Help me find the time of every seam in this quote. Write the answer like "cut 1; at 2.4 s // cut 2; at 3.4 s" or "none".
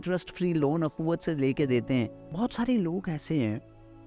cut 1; at 2.3 s